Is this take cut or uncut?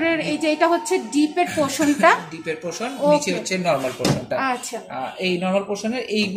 uncut